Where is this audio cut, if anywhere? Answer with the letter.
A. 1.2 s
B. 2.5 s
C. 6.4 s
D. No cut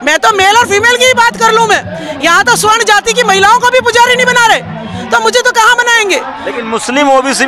D